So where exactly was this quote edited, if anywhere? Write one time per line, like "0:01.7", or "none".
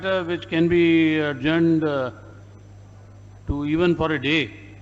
none